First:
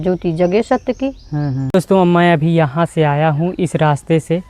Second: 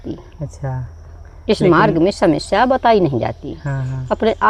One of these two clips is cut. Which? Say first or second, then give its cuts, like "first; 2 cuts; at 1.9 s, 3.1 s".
first; 1 cut; at 1.6 s